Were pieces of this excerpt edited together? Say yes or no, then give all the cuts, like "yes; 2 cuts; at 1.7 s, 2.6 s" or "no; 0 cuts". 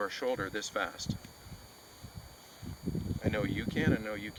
no; 0 cuts